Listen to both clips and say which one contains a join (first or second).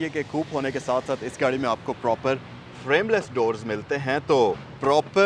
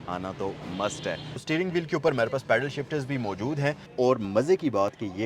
second